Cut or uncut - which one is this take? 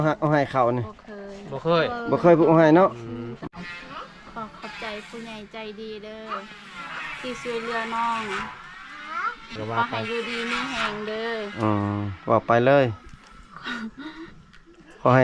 cut